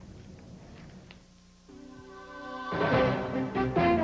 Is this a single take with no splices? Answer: yes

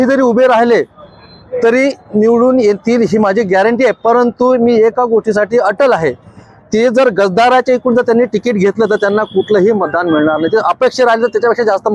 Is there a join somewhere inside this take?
no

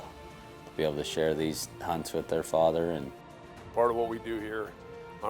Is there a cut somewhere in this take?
yes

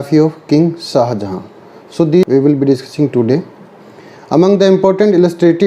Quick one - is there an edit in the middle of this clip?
yes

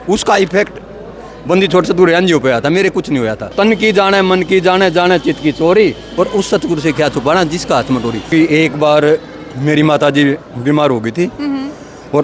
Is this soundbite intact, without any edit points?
no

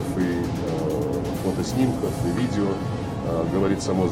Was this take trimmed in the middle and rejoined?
no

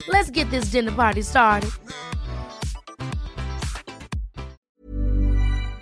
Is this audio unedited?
no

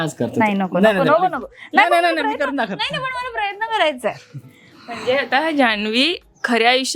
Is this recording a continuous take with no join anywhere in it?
yes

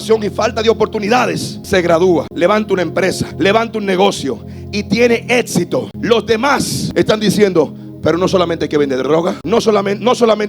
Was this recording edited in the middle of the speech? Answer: yes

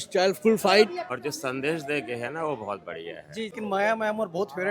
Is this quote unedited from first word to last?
no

